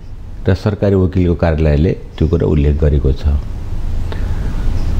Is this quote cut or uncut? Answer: uncut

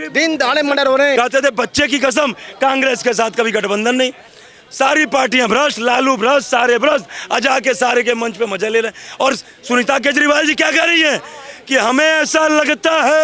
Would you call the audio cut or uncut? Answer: cut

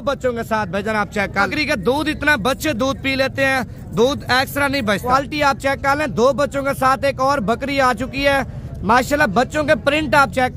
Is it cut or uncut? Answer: cut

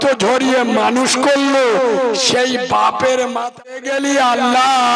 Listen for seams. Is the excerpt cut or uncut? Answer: cut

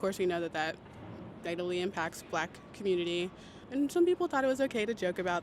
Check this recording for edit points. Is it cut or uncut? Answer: cut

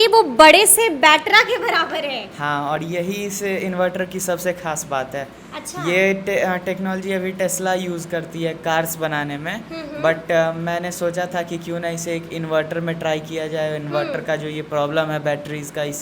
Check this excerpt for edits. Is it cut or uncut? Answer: uncut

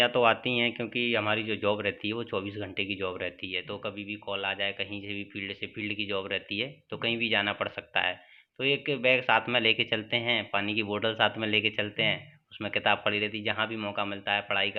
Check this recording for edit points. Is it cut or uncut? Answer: uncut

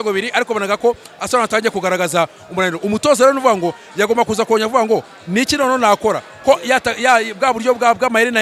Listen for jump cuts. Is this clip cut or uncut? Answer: uncut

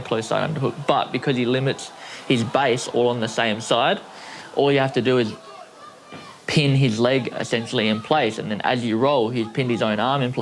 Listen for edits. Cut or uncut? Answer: uncut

